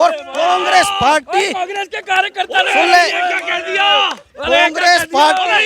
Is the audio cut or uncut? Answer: uncut